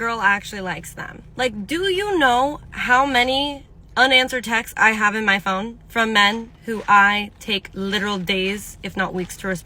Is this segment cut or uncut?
uncut